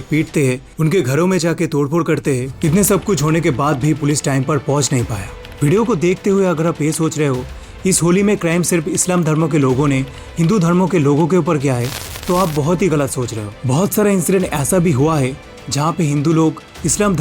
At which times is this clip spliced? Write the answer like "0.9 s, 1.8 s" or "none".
5.2 s